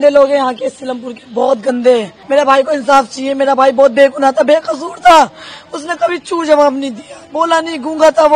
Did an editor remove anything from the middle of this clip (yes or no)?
yes